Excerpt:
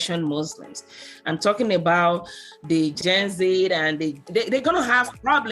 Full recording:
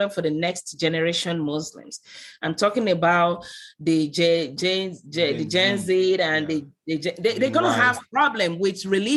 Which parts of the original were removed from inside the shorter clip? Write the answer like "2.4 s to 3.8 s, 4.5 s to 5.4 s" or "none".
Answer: 4.1 s to 5.4 s, 6.7 s to 7.1 s